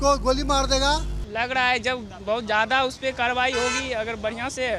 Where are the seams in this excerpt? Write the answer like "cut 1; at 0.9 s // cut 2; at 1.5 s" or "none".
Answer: cut 1; at 1.2 s

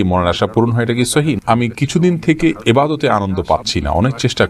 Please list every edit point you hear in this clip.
cut 1; at 1.4 s

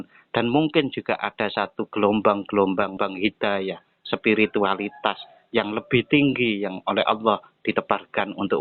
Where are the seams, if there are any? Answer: cut 1; at 3.0 s

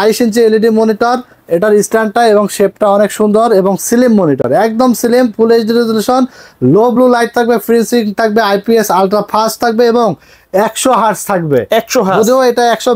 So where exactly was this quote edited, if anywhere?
none

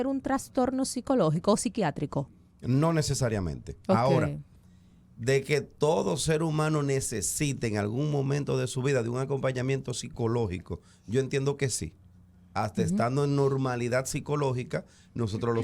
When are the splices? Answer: cut 1; at 3.7 s

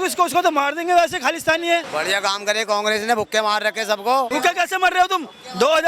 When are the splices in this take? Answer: cut 1; at 1.9 s // cut 2; at 4.3 s

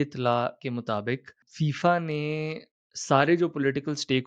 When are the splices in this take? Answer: cut 1; at 1.4 s

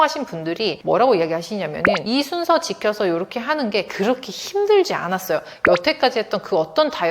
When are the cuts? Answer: cut 1; at 0.8 s // cut 2; at 1.9 s

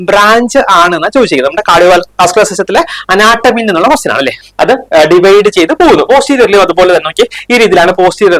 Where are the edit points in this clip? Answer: cut 1; at 4.4 s

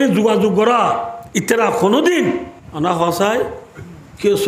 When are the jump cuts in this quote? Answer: cut 1; at 1.2 s // cut 2; at 2.6 s

